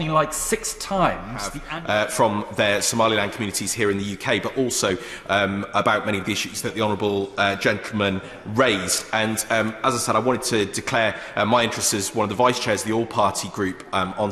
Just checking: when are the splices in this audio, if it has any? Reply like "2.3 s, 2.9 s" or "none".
1.6 s